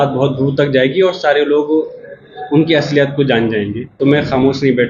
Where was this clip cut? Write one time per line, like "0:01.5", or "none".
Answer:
0:03.8